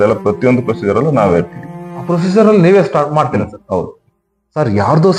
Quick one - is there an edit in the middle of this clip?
no; 0 cuts

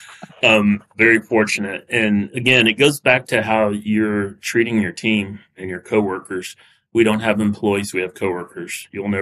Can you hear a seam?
yes; 2 cuts; at 0.9 s, 2.3 s

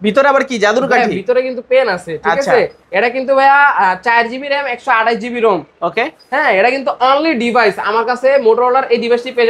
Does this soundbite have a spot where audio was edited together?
no; 0 cuts

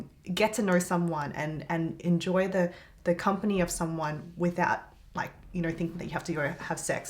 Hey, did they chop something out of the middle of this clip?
no; 0 cuts

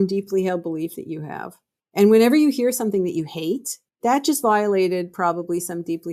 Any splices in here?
no; 0 cuts

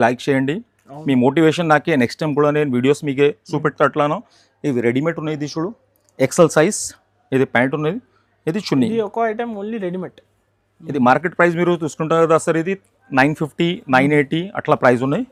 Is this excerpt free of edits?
yes; 0 cuts

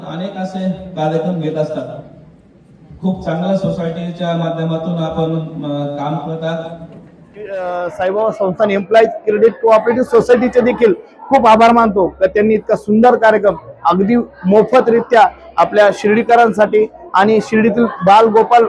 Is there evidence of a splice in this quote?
yes; 1 cut; at 7.5 s

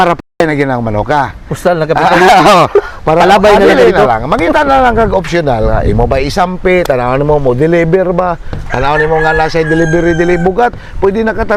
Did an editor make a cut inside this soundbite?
no; 0 cuts

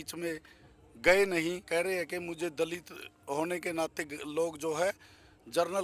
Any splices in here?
yes; 1 cut; at 1.7 s

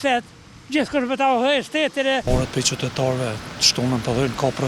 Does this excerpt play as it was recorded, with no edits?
no; 1 cut; at 2.2 s

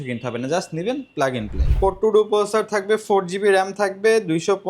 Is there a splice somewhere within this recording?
yes; 1 cut; at 1.7 s

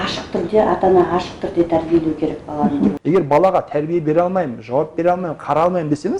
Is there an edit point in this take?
yes; 1 cut; at 3.0 s

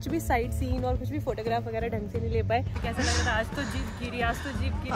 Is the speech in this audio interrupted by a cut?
yes; 1 cut; at 2.8 s

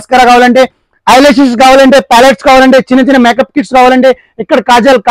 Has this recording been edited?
no; 0 cuts

